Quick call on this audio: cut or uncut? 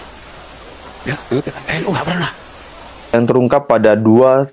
cut